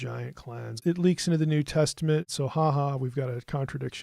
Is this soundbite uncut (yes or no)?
no